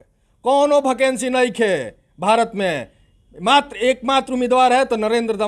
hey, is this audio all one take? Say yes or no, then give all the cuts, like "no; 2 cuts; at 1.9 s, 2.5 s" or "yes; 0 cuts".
yes; 0 cuts